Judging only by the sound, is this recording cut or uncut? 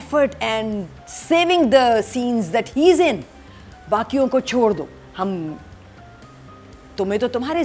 uncut